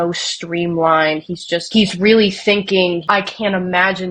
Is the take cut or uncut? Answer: cut